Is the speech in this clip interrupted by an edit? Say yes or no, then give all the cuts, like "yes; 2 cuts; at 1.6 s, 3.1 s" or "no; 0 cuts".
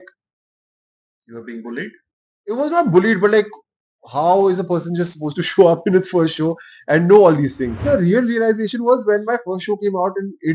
yes; 1 cut; at 7.8 s